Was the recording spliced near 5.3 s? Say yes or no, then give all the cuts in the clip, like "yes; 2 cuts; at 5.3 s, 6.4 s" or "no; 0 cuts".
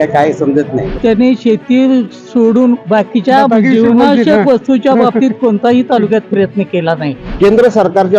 no; 2 cuts; at 0.9 s, 7.2 s